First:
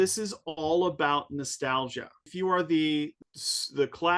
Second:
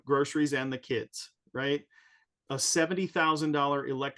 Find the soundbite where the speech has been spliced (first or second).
first